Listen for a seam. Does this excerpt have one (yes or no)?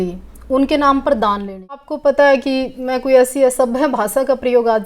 yes